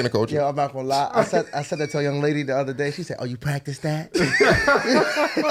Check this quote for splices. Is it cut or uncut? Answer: uncut